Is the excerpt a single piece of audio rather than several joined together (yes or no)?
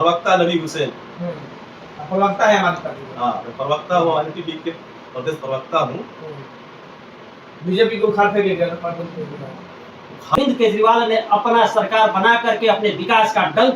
no